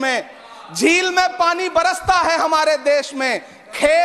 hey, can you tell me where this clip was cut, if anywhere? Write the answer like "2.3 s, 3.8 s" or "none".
none